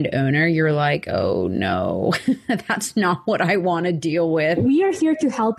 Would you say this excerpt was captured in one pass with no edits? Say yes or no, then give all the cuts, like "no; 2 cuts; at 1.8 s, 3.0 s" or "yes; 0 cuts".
no; 1 cut; at 4.6 s